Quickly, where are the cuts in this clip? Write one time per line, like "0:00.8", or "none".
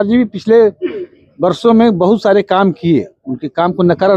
none